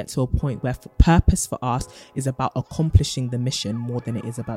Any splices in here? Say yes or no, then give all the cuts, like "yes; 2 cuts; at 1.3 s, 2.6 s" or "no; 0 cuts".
no; 0 cuts